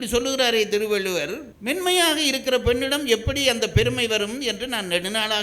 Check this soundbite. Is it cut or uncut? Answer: cut